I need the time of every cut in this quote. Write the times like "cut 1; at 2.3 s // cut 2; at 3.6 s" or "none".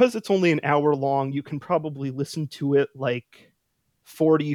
none